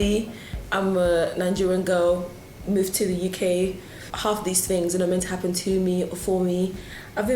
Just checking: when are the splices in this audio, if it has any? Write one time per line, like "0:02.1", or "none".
0:04.1